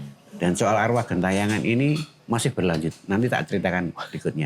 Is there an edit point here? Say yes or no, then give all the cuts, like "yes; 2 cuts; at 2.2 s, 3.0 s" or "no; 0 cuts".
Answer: yes; 1 cut; at 2.1 s